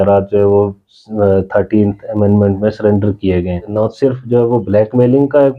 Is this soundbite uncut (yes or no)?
no